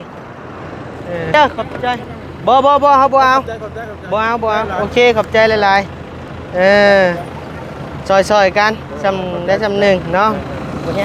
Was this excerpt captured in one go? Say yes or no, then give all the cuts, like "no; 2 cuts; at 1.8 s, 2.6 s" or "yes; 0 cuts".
no; 1 cut; at 1.3 s